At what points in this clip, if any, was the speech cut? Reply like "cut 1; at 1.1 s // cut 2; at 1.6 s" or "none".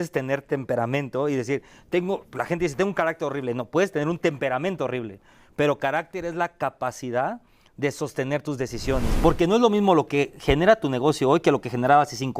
cut 1; at 9.1 s